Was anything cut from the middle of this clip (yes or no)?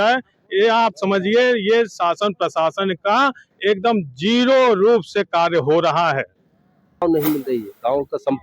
yes